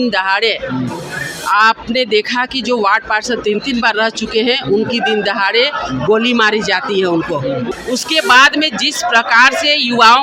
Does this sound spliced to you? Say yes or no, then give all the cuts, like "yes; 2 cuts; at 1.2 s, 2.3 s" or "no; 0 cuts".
yes; 1 cut; at 7.7 s